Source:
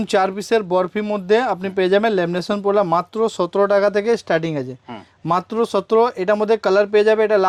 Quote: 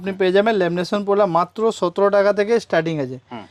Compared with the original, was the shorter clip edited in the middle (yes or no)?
no